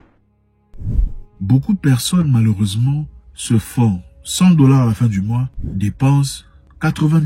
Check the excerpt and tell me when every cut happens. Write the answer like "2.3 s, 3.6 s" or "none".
1.4 s